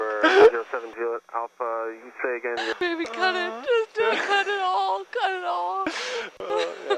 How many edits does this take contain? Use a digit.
1